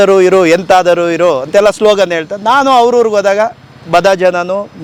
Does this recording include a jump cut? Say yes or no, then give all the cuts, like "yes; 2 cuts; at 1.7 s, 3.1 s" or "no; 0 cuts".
no; 0 cuts